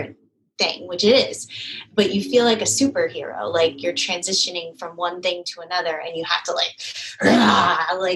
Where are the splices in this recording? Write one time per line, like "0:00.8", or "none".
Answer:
none